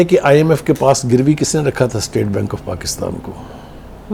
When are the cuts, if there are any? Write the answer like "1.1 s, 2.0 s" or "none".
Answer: none